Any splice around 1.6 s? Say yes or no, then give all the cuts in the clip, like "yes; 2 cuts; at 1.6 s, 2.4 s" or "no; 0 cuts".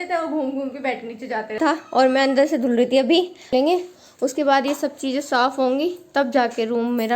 yes; 2 cuts; at 1.6 s, 3.5 s